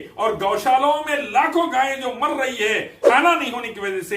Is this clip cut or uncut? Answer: cut